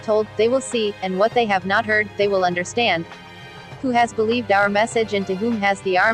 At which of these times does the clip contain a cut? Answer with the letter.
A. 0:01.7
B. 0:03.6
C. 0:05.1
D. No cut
B